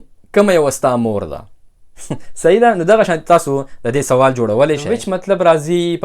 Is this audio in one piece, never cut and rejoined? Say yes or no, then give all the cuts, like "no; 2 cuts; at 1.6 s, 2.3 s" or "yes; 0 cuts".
no; 1 cut; at 4.9 s